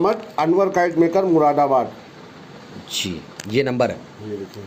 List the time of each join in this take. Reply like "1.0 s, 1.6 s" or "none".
none